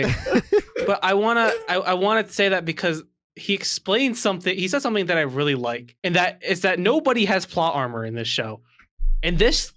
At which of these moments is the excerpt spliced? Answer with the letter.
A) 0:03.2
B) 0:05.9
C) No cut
B